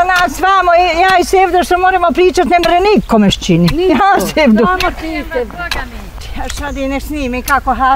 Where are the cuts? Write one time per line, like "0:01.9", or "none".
0:06.1